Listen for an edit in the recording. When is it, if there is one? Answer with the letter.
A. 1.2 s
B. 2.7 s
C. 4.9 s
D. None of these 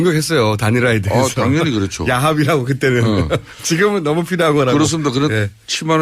D